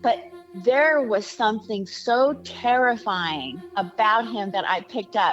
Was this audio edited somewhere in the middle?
no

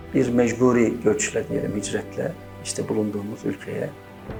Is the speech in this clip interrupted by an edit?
no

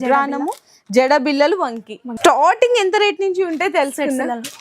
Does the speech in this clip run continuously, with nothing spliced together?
no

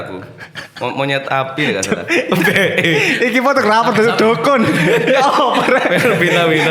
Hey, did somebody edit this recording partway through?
no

